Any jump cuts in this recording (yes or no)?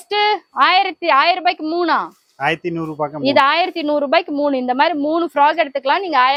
no